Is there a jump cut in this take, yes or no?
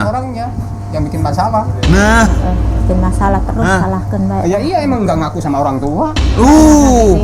no